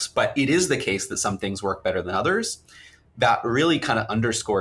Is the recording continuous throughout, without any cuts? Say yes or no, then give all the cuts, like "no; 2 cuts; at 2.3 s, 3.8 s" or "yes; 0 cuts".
yes; 0 cuts